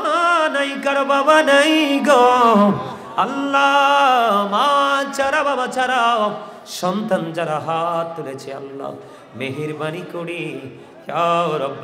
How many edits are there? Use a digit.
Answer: 0